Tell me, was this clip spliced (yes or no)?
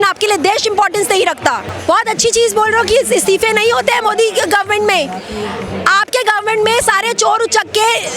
no